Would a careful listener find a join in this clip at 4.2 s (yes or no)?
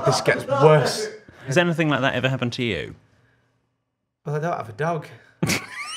no